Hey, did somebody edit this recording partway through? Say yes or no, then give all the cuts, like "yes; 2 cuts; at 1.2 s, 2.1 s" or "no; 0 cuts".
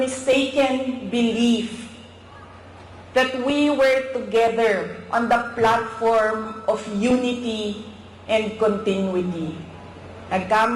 no; 0 cuts